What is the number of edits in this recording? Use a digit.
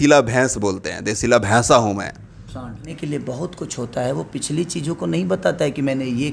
1